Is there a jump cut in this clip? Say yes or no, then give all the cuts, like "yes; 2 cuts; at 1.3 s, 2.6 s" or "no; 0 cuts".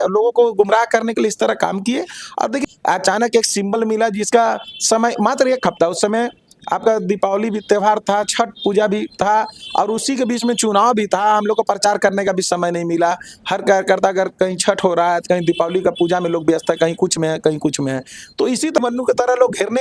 yes; 2 cuts; at 2.7 s, 18.8 s